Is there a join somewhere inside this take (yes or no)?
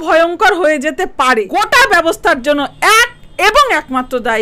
yes